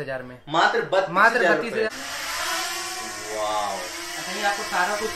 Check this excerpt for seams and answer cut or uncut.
cut